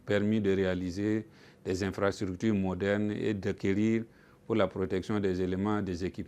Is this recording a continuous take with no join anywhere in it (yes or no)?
yes